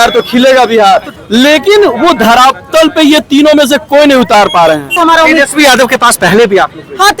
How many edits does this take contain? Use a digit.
2